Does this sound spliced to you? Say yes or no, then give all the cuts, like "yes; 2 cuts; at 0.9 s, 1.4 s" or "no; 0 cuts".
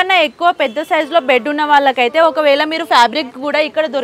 no; 0 cuts